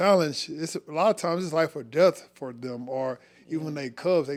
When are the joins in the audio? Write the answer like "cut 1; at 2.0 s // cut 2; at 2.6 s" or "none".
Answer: none